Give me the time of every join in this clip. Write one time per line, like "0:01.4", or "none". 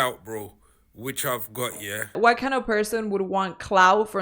0:02.2